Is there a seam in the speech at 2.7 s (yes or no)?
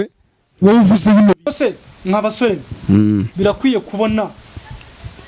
no